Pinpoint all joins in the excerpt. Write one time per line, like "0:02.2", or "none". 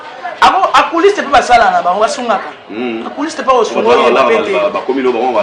none